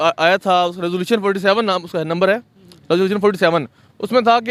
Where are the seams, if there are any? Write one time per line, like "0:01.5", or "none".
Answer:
none